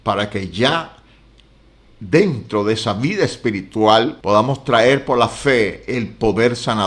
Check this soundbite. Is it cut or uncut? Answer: cut